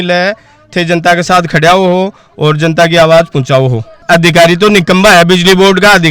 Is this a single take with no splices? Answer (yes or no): no